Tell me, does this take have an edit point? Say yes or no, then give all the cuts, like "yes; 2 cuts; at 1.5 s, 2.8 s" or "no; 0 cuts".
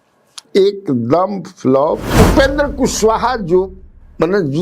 yes; 1 cut; at 2.1 s